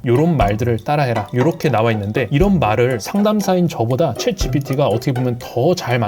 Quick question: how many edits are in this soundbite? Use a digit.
0